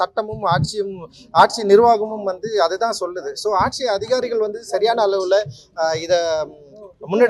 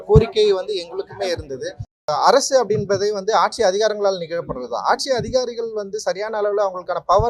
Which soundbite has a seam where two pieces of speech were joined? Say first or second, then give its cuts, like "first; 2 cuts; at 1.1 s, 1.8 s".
second; 1 cut; at 1.9 s